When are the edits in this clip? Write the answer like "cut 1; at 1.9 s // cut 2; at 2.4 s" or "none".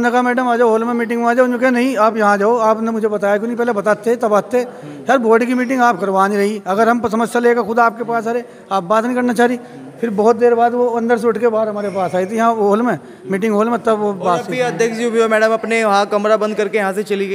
none